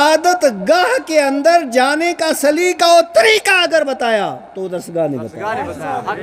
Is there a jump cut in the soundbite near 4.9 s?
no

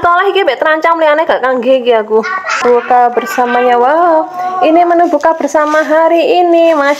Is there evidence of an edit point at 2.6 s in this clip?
yes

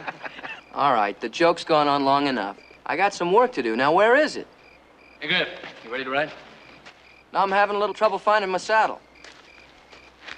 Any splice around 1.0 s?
no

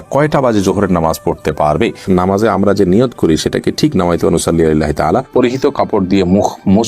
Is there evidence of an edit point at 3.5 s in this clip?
no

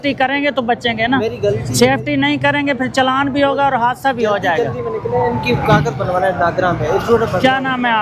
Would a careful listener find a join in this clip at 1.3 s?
no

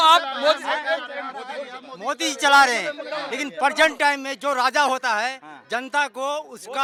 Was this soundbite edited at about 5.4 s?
no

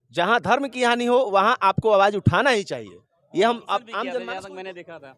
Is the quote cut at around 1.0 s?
no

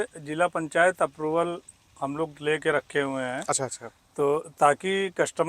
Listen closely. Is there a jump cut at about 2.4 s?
no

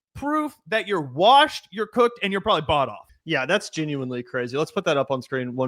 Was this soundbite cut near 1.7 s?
no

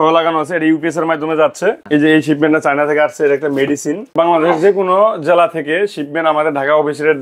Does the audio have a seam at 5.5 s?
no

